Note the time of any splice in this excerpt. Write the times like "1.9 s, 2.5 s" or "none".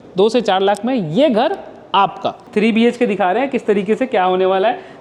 2.5 s